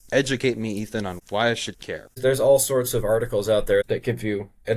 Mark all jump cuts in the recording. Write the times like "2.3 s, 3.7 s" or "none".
1.2 s, 2.2 s, 3.9 s